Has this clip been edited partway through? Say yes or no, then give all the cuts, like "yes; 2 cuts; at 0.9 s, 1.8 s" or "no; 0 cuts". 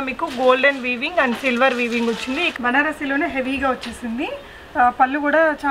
yes; 1 cut; at 2.5 s